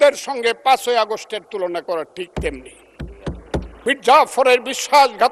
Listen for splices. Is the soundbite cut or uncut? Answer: cut